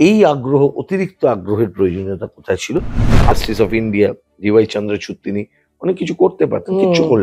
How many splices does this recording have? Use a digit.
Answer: 1